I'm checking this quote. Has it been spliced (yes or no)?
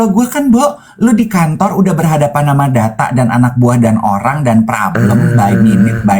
no